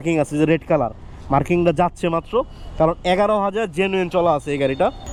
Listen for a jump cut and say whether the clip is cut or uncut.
uncut